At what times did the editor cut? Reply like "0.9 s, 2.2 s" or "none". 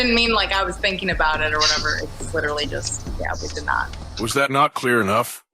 none